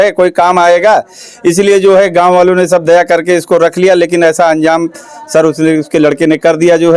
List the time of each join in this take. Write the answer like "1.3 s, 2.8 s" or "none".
none